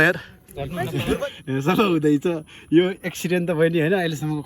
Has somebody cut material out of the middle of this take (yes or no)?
yes